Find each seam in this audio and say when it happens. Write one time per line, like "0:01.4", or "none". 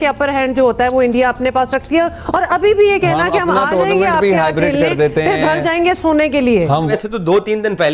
0:06.9